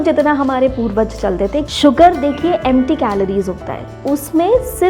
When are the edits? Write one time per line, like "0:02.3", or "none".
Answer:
0:01.7

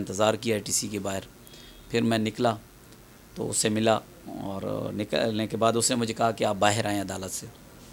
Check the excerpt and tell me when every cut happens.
none

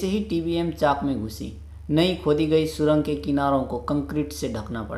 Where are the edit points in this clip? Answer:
none

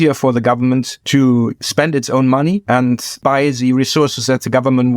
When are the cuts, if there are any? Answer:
0:01.0
0:01.6
0:02.8

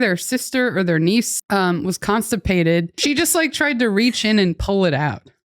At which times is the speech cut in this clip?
0:01.4
0:02.9

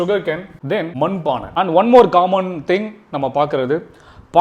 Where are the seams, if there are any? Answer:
0:00.9

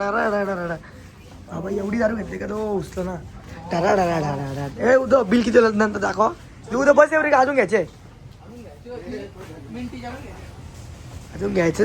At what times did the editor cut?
none

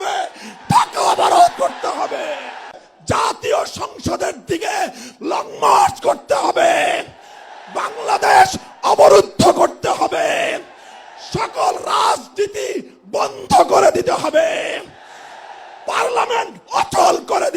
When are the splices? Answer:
0:02.7

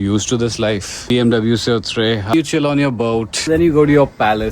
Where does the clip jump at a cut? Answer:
0:01.1
0:02.3
0:03.4

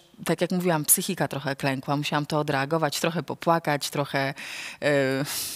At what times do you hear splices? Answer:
none

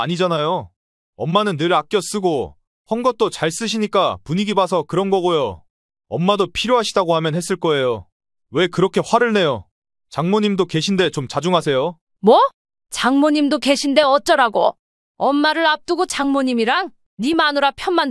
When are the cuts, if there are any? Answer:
0:12.1

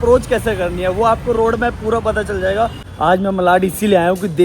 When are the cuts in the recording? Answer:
0:02.8

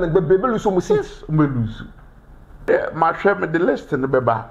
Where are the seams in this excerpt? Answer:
0:02.7

